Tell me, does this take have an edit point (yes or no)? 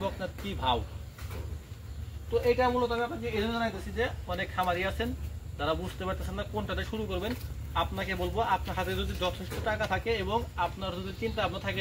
no